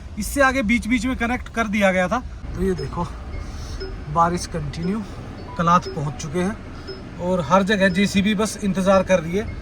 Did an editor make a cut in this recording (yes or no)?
yes